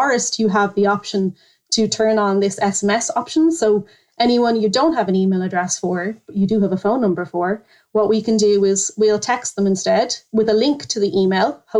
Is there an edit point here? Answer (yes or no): no